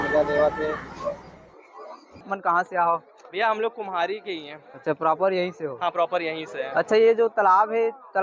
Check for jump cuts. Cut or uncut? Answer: cut